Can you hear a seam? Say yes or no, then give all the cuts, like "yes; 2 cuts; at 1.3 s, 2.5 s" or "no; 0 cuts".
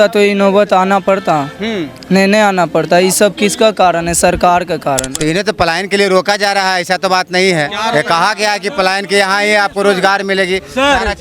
yes; 1 cut; at 5.1 s